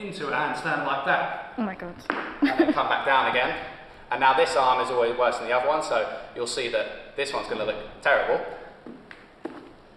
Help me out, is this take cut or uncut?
uncut